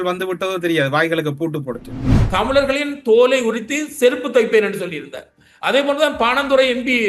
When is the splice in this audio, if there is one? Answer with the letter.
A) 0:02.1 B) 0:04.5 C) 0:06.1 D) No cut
A